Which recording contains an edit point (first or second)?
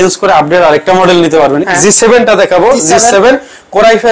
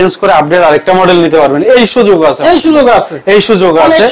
first